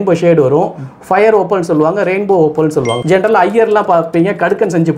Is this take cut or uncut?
cut